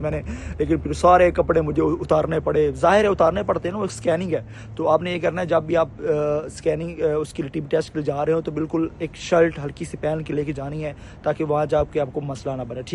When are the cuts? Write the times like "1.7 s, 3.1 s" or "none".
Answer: none